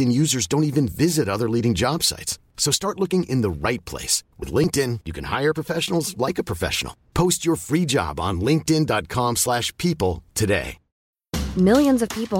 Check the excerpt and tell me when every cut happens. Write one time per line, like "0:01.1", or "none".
0:10.9